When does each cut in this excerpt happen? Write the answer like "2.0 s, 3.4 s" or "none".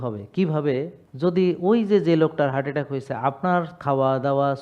1.0 s

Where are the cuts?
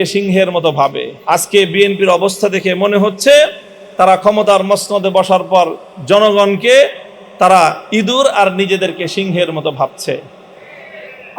1.1 s

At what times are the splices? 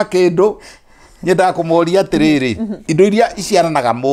2.7 s

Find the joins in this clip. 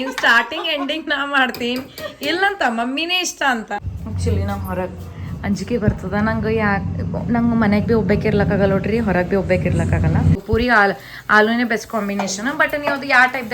3.8 s, 10.4 s

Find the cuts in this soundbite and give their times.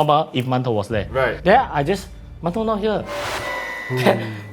1.4 s

